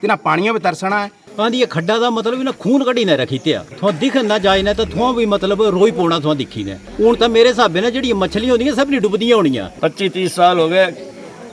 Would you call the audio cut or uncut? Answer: cut